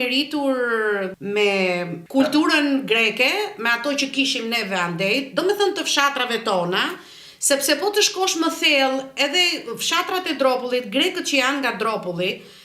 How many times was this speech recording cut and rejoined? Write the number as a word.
two